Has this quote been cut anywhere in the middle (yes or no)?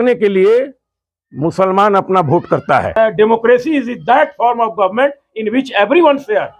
yes